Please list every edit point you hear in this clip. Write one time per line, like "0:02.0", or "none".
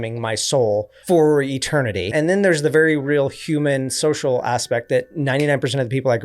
0:00.9
0:02.1